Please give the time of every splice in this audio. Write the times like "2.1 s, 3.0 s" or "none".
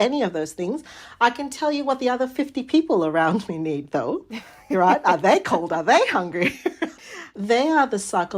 7.0 s